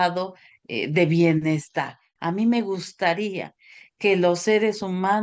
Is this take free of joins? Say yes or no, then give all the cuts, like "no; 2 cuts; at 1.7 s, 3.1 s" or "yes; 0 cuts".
no; 1 cut; at 2.1 s